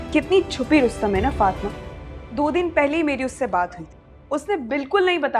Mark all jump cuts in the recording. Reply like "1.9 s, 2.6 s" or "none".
none